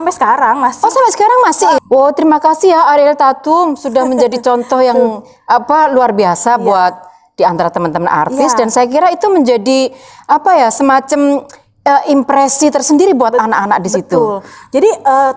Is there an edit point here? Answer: no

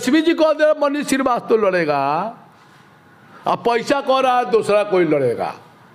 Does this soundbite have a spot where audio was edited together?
no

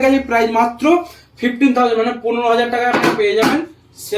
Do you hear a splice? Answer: no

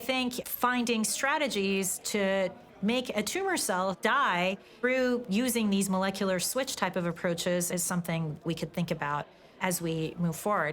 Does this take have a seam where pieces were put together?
yes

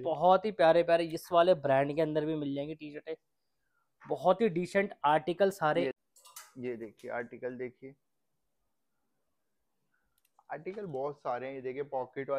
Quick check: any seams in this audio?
yes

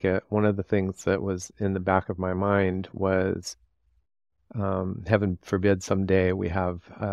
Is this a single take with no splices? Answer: yes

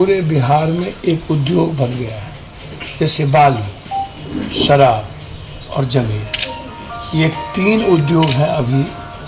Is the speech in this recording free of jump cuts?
yes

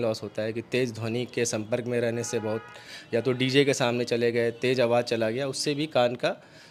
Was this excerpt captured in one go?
yes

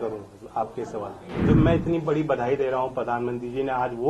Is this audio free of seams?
no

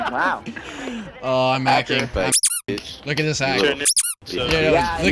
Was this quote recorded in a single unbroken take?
yes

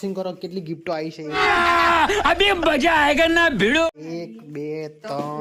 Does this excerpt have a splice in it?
no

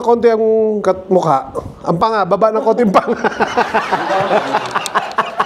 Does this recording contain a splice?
no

